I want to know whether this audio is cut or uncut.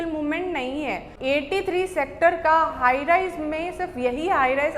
cut